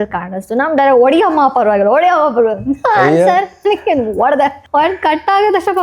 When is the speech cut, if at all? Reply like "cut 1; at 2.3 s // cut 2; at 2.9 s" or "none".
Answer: cut 1; at 4.6 s